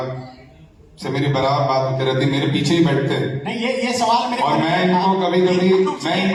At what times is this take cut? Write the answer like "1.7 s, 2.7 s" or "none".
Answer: none